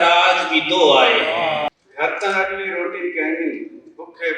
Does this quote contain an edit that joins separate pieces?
yes; 1 cut; at 1.7 s

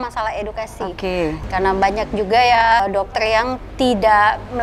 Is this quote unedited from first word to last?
no; 2 cuts; at 1.4 s, 2.8 s

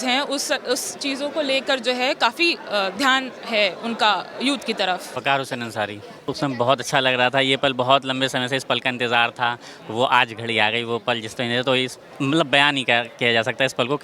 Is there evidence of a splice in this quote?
yes; 2 cuts; at 5.1 s, 6.3 s

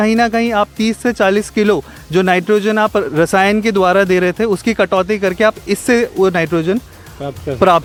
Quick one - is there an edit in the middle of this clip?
no; 0 cuts

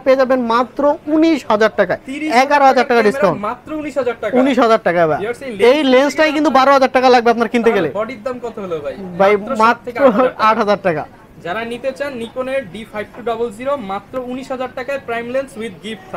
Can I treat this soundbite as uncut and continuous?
yes; 0 cuts

